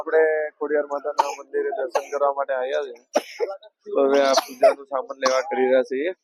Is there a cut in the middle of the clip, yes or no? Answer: no